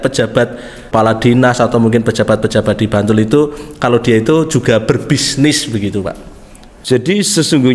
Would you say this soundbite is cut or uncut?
cut